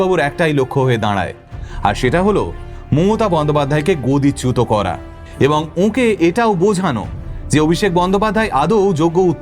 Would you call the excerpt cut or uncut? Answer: uncut